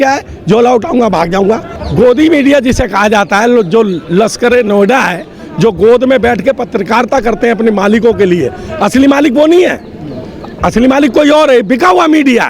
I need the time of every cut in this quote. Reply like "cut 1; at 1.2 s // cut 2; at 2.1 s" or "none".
cut 1; at 1.7 s